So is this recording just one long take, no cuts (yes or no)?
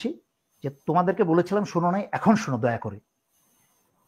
yes